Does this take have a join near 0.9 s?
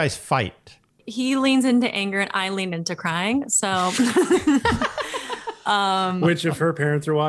yes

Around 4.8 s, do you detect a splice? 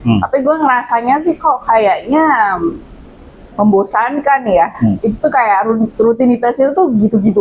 no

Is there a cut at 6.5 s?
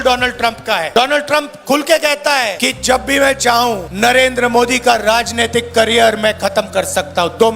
no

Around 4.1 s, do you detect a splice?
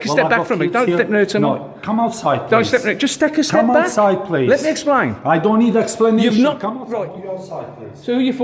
no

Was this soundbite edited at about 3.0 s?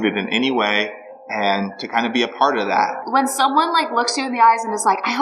yes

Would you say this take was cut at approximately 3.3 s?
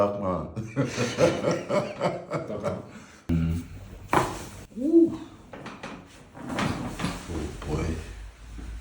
yes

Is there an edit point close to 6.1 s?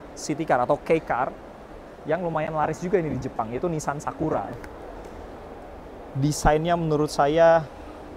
no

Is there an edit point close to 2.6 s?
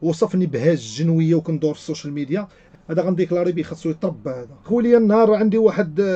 yes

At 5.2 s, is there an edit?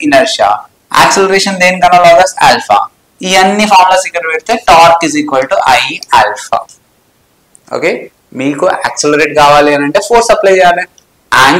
no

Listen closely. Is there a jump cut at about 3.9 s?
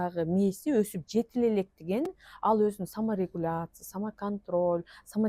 no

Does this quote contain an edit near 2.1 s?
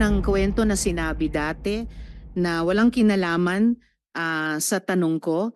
no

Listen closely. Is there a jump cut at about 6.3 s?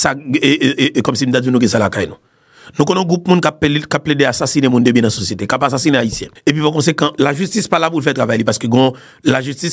yes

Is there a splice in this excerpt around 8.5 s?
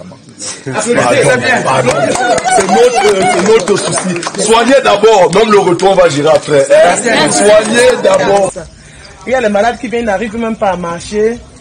yes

